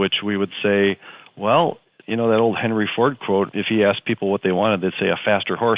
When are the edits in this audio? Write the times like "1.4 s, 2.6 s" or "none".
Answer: 1.9 s, 3.5 s